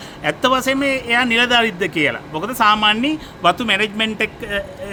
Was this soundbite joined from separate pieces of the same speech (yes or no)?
no